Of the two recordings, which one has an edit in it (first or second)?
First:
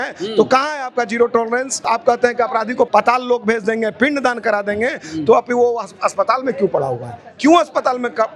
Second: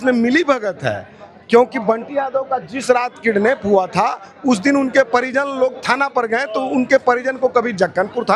first